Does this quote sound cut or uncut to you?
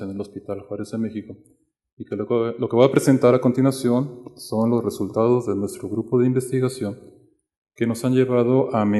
uncut